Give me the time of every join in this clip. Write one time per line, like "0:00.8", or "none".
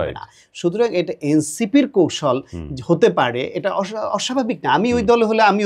none